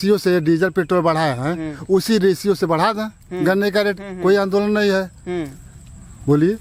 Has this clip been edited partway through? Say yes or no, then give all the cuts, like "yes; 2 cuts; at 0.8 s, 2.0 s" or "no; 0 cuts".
no; 0 cuts